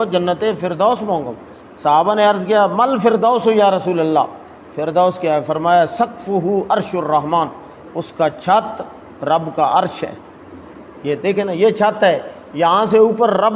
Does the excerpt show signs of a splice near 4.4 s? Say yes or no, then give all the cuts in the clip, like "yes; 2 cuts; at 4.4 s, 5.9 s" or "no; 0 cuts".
no; 0 cuts